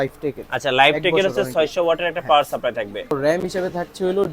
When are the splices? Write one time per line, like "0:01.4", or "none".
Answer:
0:03.1